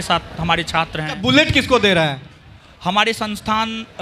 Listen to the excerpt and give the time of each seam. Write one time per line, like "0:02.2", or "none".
0:01.1